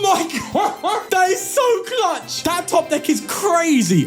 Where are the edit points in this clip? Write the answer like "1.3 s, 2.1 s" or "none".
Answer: 1.1 s, 2.3 s